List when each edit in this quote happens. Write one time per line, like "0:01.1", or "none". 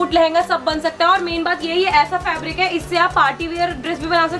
none